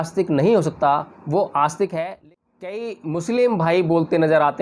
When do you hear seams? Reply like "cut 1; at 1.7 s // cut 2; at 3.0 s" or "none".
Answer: cut 1; at 2.1 s